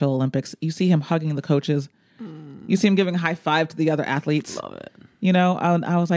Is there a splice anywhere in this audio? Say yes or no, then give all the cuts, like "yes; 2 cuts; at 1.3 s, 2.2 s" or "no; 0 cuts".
no; 0 cuts